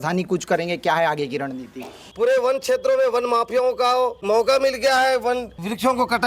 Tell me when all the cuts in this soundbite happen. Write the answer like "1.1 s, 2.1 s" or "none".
2.0 s, 4.2 s